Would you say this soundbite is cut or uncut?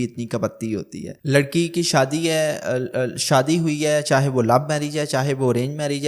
cut